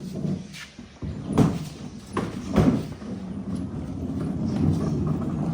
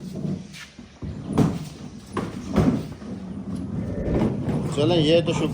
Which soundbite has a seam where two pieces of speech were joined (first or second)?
second